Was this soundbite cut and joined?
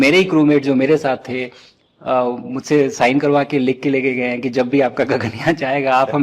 no; 0 cuts

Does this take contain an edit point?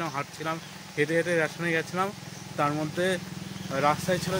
no; 0 cuts

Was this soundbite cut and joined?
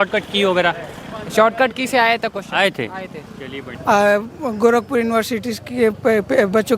yes; 1 cut; at 3.7 s

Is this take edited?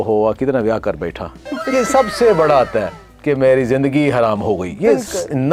no; 0 cuts

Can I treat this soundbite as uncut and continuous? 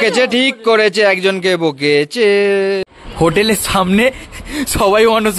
no; 1 cut; at 3.0 s

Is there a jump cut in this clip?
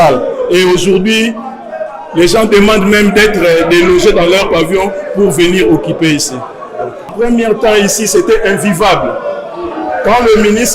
yes; 1 cut; at 7.1 s

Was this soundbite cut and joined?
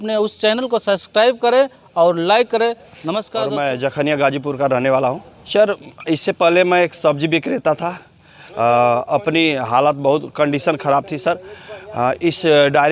no; 0 cuts

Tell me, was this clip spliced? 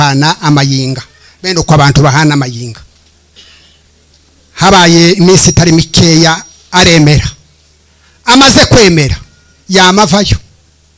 no; 0 cuts

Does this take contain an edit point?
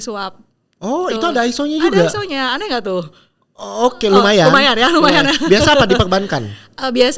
no; 0 cuts

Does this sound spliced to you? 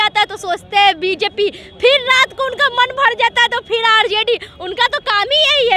no; 0 cuts

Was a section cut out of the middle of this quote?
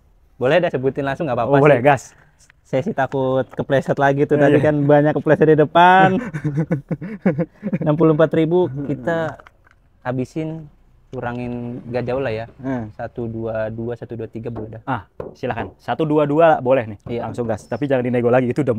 no; 0 cuts

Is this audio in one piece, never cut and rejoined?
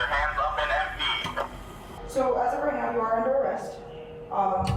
no; 1 cut; at 1.9 s

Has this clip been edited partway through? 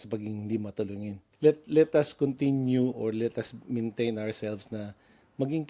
no; 0 cuts

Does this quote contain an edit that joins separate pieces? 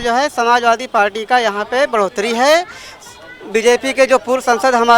no; 0 cuts

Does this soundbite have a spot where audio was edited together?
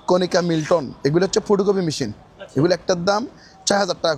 no; 0 cuts

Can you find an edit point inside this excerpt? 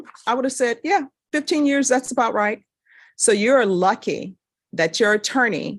no; 0 cuts

